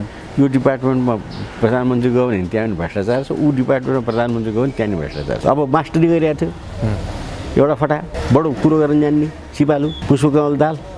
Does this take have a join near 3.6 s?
no; 3 cuts; at 5.4 s, 8.1 s, 10.0 s

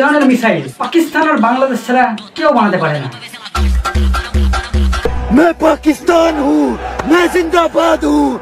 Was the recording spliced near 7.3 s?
no; 1 cut; at 5.1 s

